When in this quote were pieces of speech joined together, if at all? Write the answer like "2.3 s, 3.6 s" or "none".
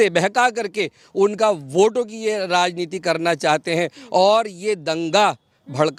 none